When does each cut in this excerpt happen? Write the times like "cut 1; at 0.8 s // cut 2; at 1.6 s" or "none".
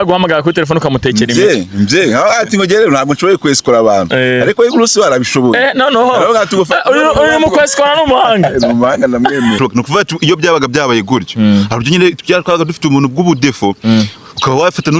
cut 1; at 9.6 s